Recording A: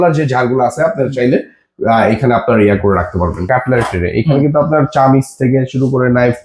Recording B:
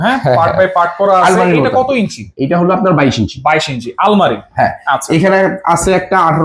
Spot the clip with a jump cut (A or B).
A